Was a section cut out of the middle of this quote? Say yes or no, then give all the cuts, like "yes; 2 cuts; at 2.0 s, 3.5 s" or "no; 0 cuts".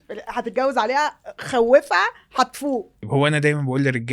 yes; 1 cut; at 3.0 s